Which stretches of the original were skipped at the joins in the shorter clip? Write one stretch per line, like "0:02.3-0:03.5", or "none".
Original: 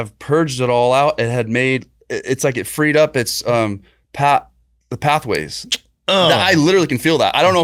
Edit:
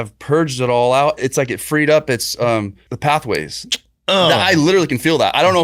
0:01.2-0:02.2
0:03.9-0:04.8